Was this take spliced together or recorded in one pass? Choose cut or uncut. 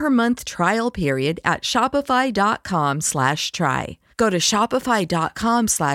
uncut